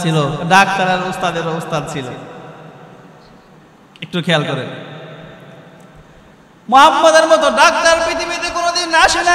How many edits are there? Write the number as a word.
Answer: zero